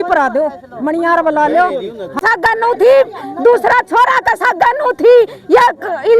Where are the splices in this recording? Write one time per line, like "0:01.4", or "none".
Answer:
0:02.2